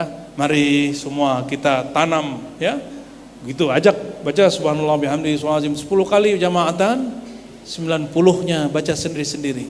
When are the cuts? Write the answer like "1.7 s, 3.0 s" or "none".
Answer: none